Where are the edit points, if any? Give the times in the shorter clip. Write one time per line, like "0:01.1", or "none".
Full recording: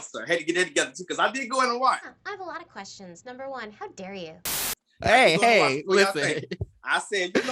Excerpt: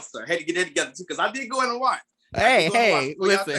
0:02.2